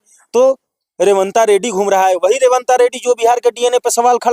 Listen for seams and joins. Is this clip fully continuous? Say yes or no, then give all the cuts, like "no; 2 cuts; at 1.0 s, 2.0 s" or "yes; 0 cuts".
yes; 0 cuts